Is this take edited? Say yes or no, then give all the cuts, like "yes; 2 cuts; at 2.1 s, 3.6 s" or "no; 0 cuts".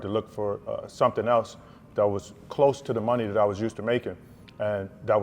no; 0 cuts